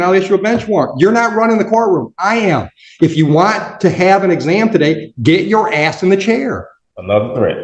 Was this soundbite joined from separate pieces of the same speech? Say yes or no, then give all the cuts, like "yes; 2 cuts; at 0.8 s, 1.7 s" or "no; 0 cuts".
yes; 1 cut; at 6.7 s